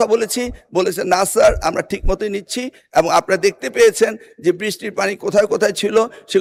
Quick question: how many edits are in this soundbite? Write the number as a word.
zero